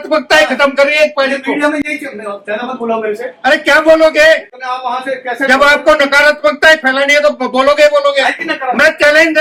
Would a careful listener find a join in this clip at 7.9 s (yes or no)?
no